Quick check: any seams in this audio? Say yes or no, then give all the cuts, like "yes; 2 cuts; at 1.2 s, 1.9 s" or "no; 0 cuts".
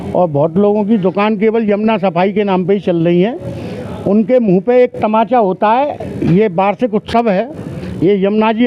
no; 0 cuts